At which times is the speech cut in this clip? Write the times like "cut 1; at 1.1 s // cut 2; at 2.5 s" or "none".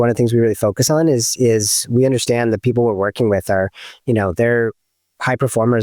none